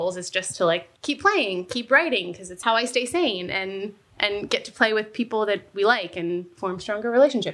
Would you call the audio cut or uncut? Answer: cut